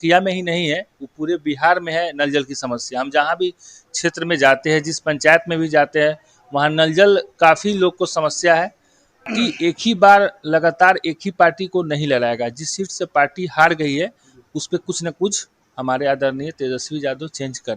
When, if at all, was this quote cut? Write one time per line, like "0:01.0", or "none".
0:09.3